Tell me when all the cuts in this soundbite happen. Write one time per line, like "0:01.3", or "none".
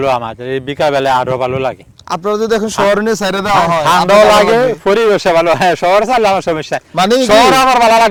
none